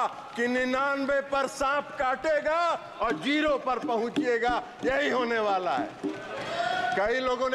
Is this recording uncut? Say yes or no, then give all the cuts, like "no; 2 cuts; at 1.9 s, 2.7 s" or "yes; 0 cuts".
yes; 0 cuts